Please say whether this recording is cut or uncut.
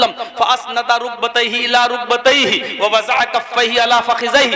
uncut